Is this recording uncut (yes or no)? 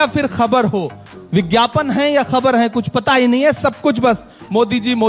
yes